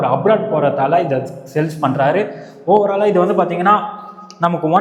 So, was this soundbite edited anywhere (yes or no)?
no